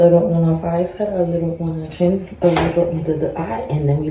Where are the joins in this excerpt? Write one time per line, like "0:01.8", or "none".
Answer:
none